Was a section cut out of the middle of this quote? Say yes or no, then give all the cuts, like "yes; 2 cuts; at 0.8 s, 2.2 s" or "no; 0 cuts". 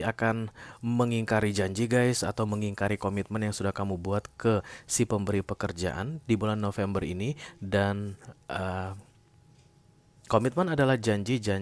no; 0 cuts